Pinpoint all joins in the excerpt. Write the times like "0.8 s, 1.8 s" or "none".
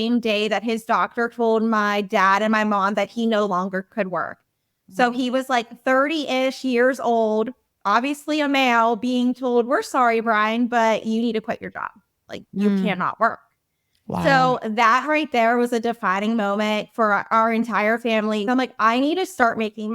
18.5 s